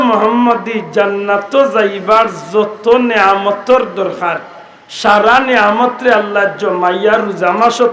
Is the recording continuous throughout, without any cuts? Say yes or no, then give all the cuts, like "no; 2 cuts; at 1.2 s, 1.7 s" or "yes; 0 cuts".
yes; 0 cuts